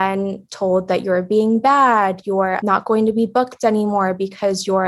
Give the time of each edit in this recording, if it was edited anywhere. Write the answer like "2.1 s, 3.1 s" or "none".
2.6 s